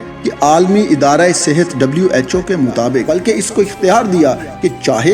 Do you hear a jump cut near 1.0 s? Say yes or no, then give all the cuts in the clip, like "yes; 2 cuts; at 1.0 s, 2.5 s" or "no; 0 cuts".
no; 1 cut; at 3.1 s